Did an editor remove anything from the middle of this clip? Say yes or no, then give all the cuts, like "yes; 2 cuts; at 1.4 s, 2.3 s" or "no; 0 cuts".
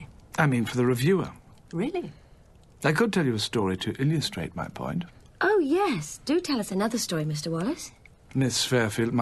no; 0 cuts